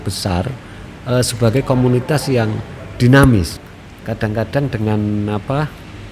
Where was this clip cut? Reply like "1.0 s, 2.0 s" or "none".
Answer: 3.6 s